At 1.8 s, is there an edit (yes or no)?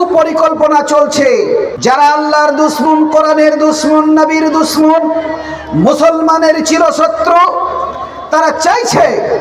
yes